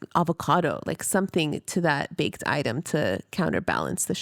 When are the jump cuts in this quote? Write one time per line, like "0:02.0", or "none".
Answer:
none